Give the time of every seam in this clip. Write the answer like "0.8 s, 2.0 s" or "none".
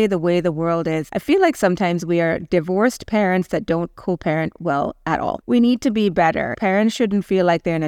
1.0 s, 5.4 s, 6.6 s